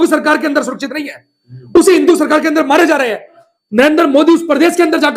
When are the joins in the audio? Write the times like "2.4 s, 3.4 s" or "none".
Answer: 3.4 s